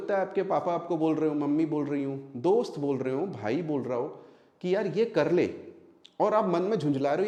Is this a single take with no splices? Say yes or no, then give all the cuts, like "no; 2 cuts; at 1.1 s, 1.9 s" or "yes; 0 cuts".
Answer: yes; 0 cuts